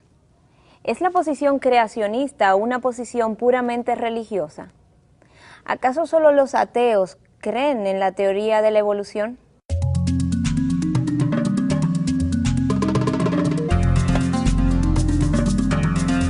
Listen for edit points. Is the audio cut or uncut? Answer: uncut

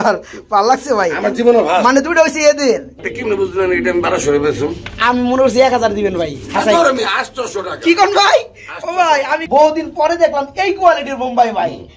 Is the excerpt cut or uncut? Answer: cut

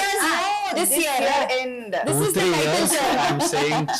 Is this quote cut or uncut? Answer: uncut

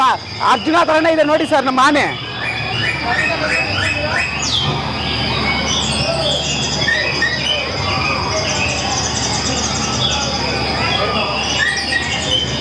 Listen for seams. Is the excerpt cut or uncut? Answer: uncut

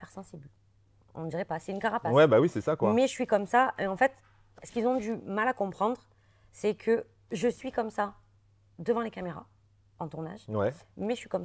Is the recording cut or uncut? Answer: uncut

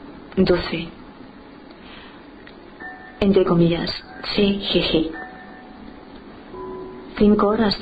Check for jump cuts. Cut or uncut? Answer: cut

